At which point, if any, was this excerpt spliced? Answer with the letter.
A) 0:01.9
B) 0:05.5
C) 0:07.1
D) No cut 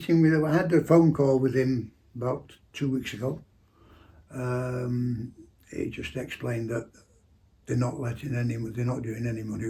D